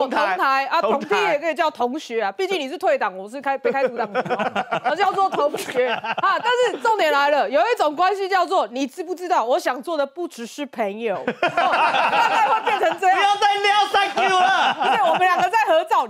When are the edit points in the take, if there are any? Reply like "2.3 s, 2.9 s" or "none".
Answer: none